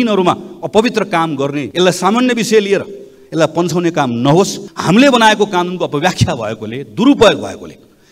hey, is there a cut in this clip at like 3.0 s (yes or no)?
no